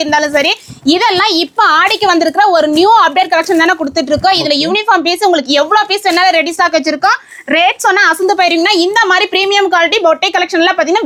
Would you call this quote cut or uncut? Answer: uncut